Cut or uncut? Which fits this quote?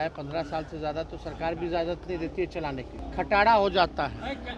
cut